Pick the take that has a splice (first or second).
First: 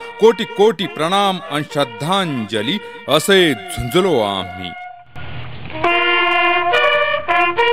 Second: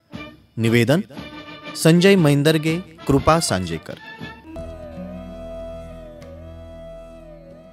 second